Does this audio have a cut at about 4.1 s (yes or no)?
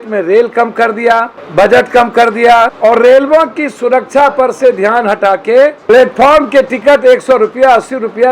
no